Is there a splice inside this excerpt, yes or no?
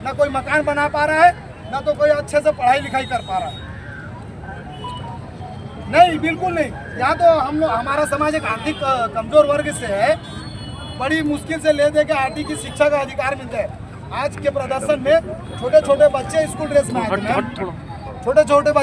no